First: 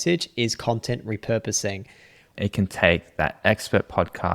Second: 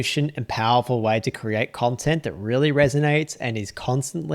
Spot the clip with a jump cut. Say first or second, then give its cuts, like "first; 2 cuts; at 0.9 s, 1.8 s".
first; 1 cut; at 2.2 s